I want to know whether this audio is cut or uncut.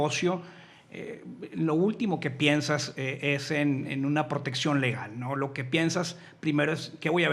uncut